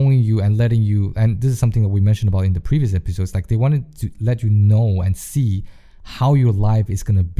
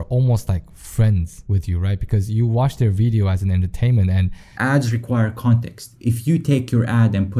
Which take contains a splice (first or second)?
second